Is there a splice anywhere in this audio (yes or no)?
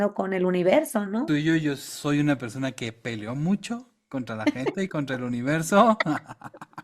yes